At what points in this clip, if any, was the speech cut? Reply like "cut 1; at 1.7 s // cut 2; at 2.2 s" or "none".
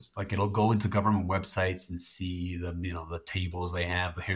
none